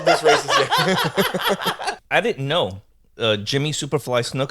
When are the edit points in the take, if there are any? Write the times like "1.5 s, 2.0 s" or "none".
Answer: 1.9 s